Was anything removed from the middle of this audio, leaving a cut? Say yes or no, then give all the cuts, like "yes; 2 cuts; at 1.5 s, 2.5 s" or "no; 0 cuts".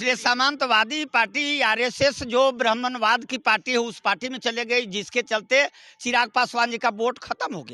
no; 0 cuts